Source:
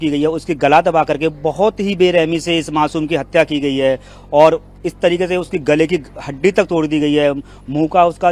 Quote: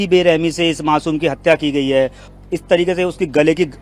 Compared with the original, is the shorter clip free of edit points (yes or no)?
no